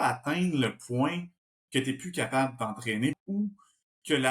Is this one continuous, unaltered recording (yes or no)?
no